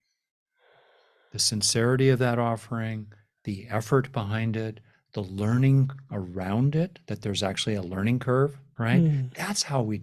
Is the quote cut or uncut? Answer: cut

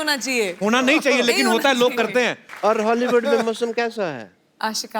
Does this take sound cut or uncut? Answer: cut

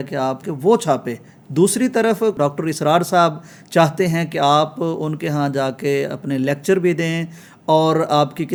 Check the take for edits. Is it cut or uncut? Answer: uncut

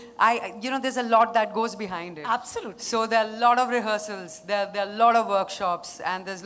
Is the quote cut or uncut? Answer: uncut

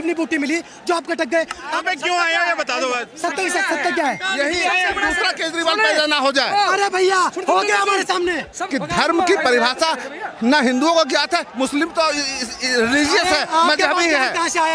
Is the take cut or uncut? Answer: cut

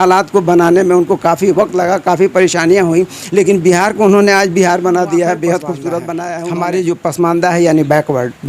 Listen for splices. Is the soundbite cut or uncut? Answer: cut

